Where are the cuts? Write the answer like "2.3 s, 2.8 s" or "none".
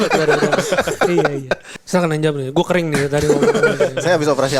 1.7 s